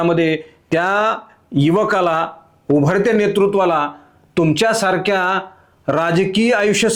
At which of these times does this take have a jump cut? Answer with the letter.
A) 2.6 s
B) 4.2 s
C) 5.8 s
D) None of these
D